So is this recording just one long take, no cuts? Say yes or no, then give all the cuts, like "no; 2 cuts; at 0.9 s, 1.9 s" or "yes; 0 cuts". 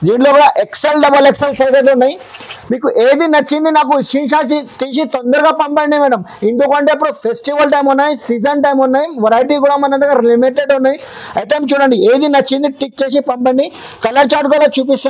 yes; 0 cuts